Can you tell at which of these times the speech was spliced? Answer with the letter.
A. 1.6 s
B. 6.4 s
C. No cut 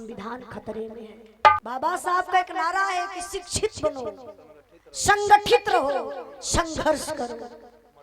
A